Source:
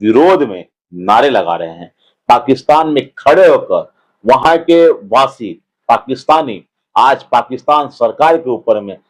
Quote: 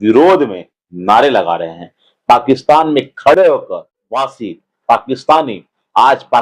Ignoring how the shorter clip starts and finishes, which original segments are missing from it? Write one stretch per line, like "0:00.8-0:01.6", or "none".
0:04.1-0:05.1